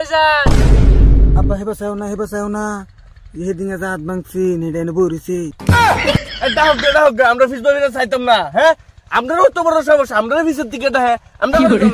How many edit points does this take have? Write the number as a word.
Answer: zero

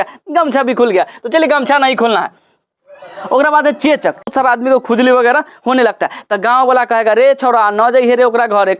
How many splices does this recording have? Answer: one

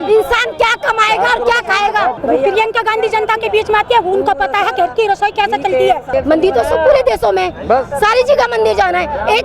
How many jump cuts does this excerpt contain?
two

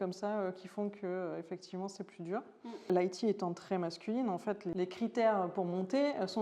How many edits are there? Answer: two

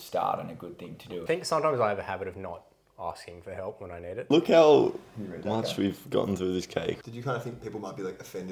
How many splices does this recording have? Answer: three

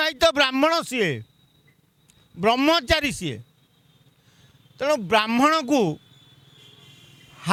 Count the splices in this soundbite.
zero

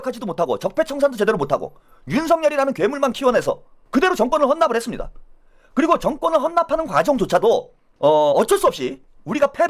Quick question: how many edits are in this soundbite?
zero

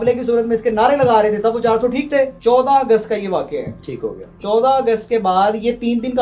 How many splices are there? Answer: two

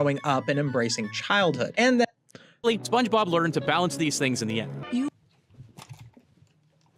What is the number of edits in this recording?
zero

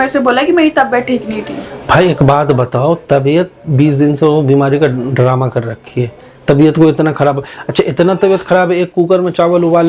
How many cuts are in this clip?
zero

